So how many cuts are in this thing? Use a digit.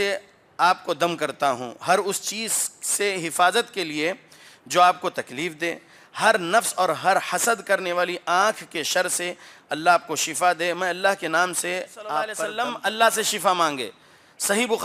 1